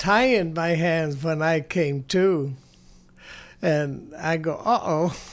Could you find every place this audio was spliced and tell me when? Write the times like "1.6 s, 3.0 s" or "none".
none